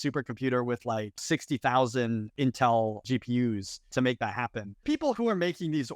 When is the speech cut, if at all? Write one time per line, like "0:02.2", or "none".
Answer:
0:01.2
0:02.3
0:03.3
0:04.8